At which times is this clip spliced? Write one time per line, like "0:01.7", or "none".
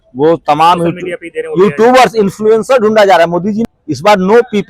0:03.6